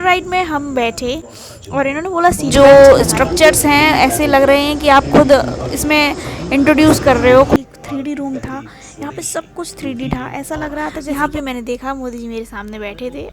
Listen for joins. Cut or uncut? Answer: cut